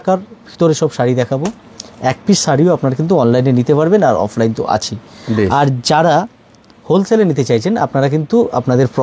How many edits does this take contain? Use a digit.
0